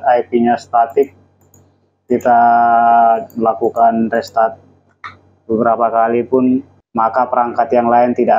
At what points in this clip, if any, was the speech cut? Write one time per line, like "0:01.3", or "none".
0:06.8

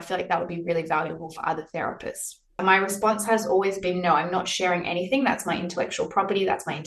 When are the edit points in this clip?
0:02.6

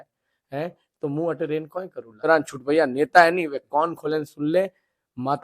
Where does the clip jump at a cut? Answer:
0:02.3

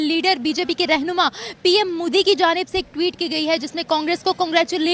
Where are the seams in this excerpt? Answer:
none

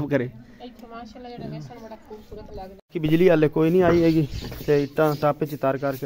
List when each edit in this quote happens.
0:02.8

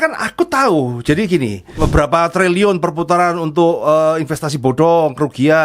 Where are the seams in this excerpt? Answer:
0:01.7

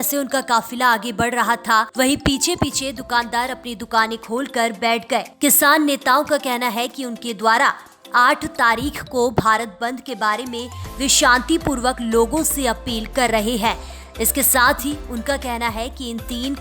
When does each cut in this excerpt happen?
0:01.9
0:05.3

